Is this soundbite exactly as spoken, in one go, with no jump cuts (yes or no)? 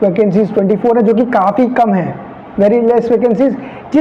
yes